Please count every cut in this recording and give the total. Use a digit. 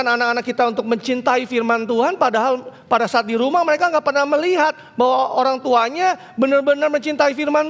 0